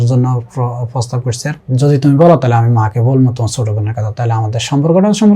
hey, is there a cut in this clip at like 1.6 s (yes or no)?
yes